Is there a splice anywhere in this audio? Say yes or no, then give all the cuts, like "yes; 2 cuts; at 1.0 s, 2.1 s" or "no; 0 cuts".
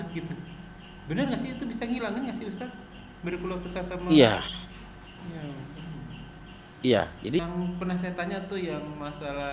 yes; 1 cut; at 7.4 s